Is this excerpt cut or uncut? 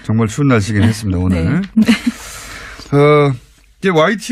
uncut